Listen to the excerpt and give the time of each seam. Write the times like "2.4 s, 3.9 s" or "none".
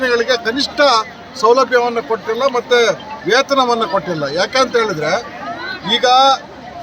none